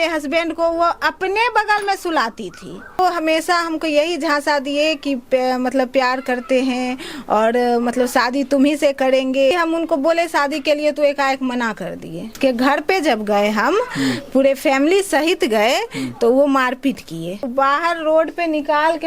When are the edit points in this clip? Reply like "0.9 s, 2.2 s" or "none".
3.0 s, 9.5 s, 12.4 s, 17.5 s